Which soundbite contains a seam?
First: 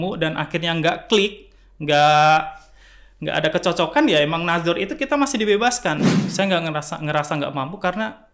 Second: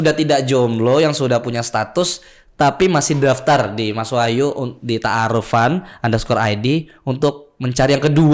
first; 1 cut; at 6.1 s

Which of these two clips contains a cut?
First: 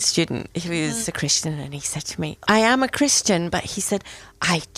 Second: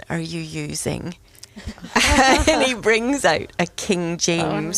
first; 2 cuts; at 1.0 s, 2.4 s

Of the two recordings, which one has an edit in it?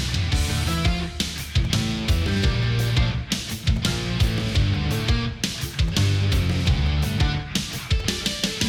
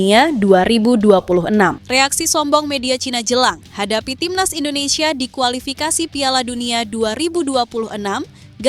second; 1 cut; at 1.8 s

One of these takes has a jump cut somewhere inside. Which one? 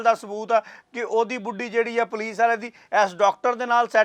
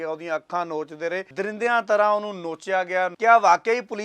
second; 2 cuts; at 1.3 s, 3.1 s

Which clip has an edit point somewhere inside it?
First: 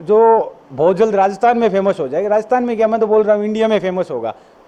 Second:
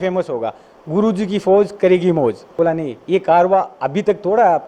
second; 1 cut; at 2.5 s

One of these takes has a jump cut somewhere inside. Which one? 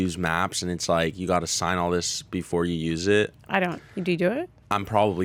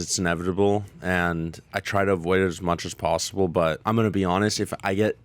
second; 1 cut; at 3.8 s

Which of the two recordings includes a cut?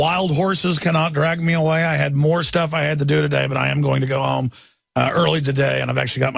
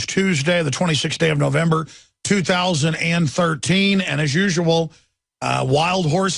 first; 1 cut; at 2.3 s

